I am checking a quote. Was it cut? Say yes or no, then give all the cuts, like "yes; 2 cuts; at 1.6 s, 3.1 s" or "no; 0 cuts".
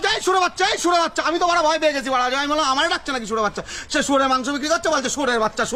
no; 0 cuts